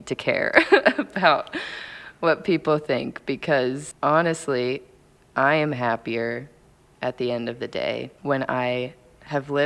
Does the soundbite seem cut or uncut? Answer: cut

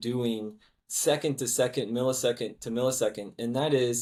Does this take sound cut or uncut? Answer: uncut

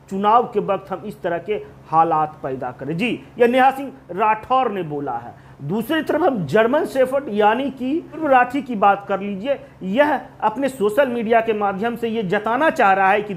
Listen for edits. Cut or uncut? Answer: uncut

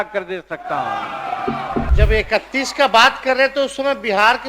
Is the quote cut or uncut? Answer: cut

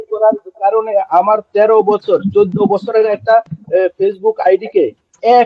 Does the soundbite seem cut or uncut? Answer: uncut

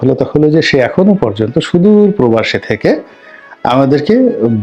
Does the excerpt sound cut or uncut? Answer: uncut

